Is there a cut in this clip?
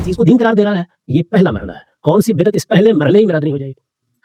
no; 0 cuts

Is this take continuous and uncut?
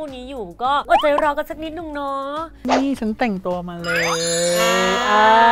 no; 1 cut; at 2.6 s

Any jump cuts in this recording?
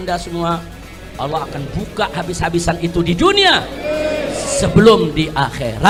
no; 0 cuts

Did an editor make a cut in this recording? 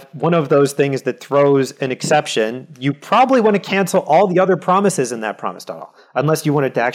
no; 0 cuts

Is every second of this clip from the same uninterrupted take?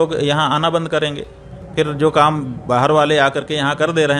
yes; 0 cuts

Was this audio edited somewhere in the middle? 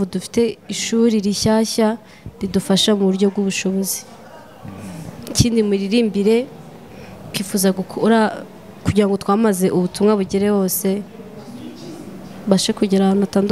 no; 0 cuts

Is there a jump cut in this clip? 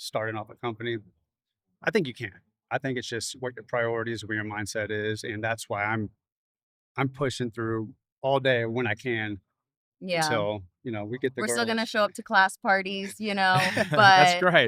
no; 0 cuts

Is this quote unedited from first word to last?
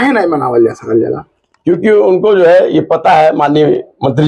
yes; 0 cuts

